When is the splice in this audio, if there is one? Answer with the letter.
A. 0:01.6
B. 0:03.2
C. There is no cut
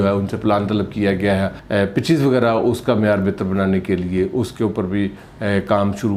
A